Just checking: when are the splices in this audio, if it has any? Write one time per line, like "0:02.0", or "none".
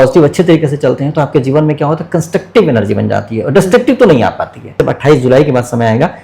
0:04.8